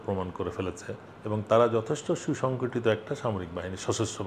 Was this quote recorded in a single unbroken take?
yes; 0 cuts

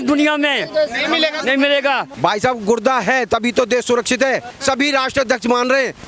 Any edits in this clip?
yes; 2 cuts; at 2.1 s, 4.5 s

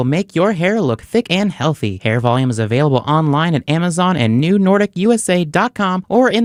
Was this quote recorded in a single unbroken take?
yes; 0 cuts

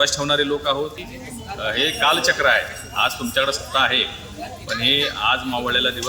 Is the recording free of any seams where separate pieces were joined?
no; 1 cut; at 1.1 s

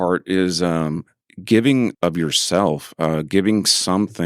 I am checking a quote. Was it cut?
yes; 2 cuts; at 1.1 s, 1.9 s

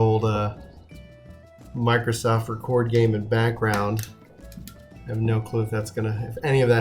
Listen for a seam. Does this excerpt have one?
yes; 1 cut; at 2.6 s

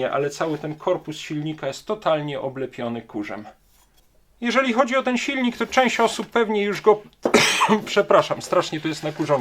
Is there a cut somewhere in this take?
no; 0 cuts

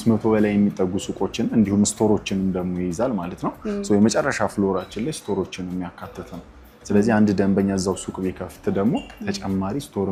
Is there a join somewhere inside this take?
no; 0 cuts

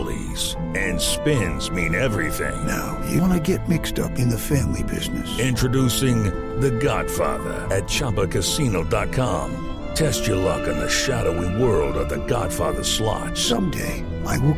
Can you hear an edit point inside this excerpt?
no; 0 cuts

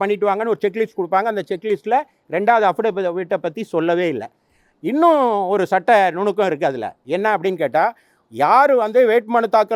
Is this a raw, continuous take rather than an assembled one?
yes; 0 cuts

